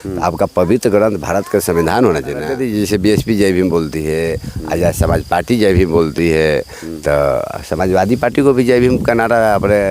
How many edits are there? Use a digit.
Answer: 1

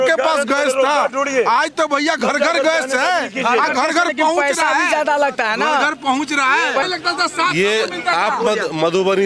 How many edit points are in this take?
1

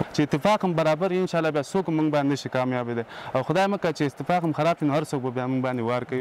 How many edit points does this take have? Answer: 0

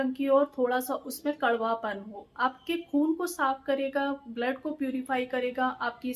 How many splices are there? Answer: 0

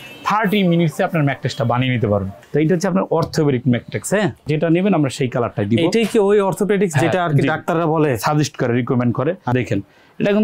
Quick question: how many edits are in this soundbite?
3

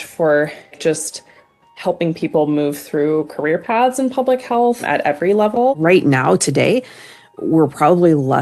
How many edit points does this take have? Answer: 3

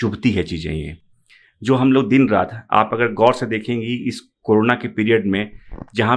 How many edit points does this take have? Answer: 0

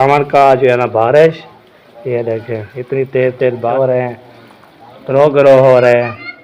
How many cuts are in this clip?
1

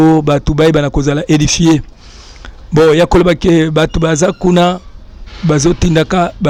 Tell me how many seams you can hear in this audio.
0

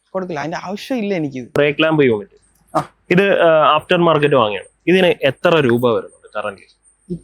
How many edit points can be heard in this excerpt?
1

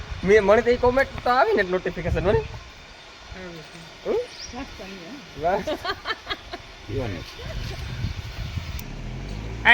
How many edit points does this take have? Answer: 1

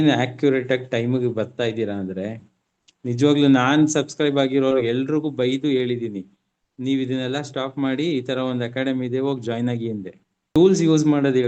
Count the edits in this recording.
1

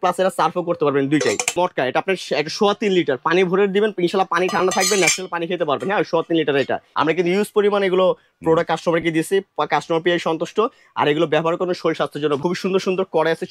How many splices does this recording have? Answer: 3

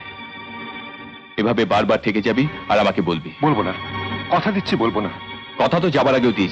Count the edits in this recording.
0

